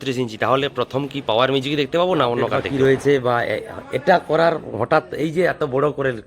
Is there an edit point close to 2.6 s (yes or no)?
yes